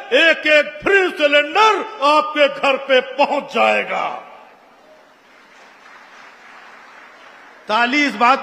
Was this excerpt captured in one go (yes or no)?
yes